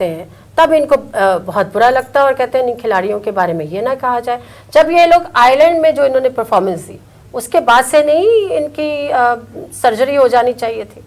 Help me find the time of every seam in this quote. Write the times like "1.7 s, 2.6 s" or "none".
none